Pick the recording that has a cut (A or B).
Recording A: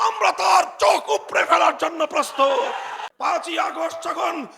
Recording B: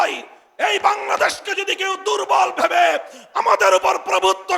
A